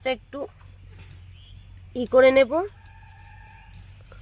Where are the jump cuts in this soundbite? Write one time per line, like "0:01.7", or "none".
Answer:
none